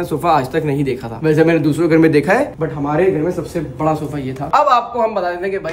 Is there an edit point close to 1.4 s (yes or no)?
no